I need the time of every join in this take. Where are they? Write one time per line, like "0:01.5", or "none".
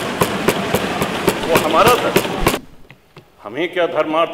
0:02.6